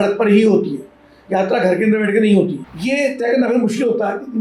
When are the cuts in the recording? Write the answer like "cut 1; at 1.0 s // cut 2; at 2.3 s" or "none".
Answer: cut 1; at 2.6 s